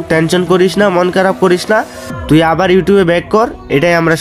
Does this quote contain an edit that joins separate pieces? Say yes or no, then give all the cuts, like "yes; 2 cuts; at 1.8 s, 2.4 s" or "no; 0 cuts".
no; 0 cuts